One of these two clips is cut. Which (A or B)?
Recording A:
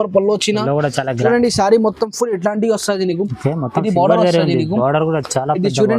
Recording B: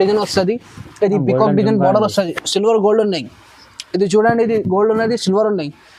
A